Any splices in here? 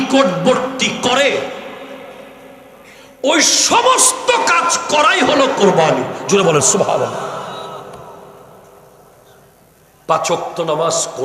no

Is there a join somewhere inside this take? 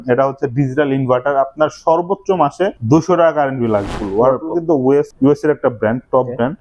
yes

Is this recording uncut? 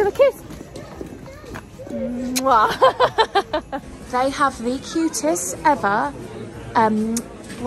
yes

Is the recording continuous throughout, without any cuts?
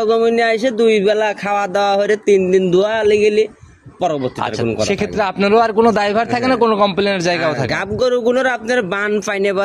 yes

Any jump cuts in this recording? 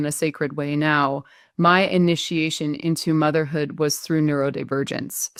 no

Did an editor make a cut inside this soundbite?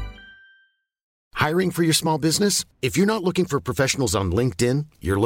yes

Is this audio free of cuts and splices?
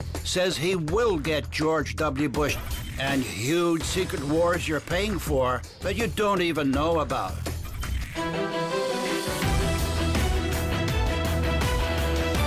no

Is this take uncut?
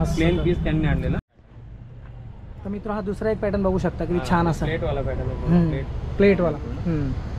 no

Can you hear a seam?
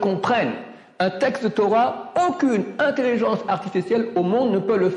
no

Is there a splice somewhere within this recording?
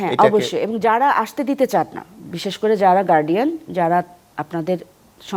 no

